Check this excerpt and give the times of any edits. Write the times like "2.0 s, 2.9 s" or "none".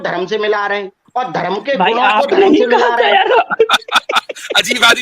1.0 s